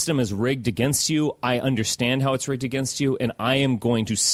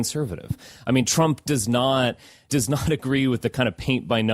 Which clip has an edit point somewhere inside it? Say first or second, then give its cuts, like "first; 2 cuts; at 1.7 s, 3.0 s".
second; 1 cut; at 2.4 s